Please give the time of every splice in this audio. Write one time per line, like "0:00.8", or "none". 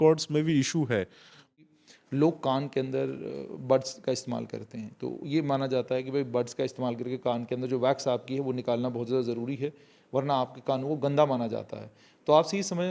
0:01.5